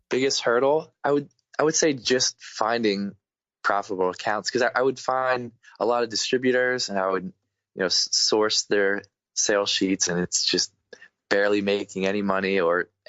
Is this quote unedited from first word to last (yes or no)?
no